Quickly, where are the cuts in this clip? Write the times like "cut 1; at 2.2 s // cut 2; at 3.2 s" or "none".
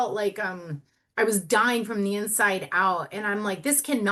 none